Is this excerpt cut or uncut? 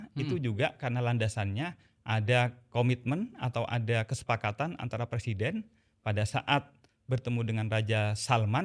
uncut